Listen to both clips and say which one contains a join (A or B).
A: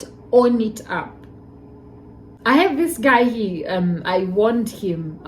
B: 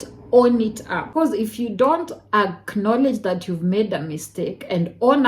B